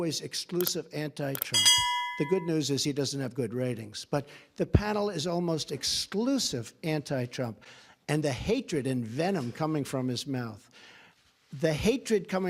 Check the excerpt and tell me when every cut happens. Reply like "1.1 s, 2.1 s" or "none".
none

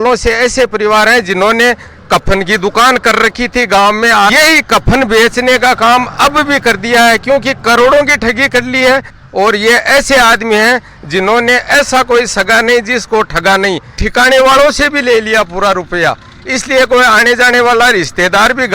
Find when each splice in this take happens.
4.3 s, 9.1 s, 14.0 s

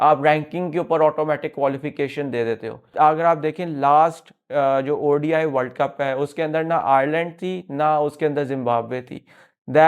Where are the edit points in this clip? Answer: 2.9 s

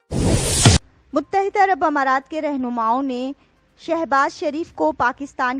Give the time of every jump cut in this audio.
0.9 s

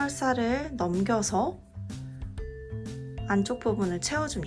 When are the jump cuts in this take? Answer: 1.5 s, 3.0 s

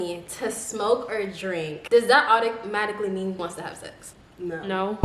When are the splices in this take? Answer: 3.4 s

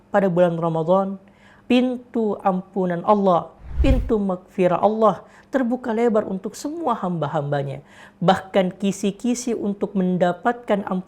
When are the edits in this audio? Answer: 1.6 s

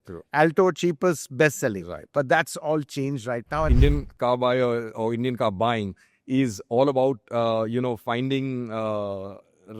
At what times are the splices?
3.7 s

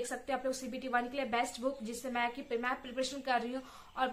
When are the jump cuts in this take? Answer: none

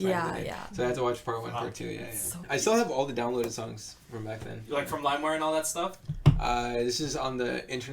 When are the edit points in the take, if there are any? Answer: 2.3 s

